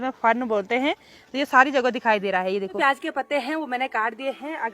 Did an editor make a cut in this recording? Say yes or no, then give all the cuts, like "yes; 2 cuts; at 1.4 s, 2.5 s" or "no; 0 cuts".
yes; 1 cut; at 2.8 s